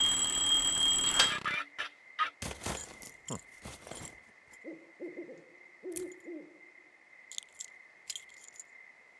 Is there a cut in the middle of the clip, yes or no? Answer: yes